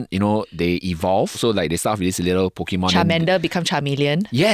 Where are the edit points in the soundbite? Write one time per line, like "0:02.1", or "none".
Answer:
0:01.4